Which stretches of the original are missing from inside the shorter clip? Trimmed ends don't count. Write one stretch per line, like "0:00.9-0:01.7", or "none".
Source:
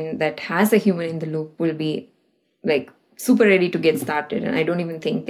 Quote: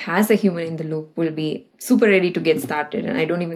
0:02.1-0:03.1